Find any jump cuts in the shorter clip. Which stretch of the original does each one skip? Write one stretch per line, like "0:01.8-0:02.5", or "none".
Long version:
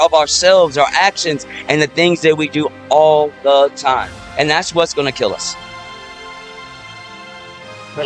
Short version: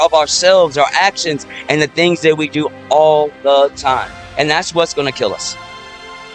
0:05.4-0:05.5